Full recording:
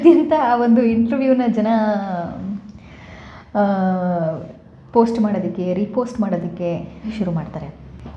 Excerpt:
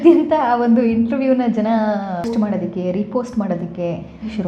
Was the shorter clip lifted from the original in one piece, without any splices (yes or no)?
no